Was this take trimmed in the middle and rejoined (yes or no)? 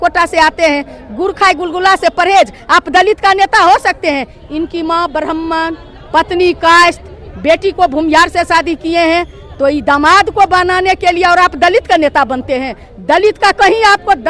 no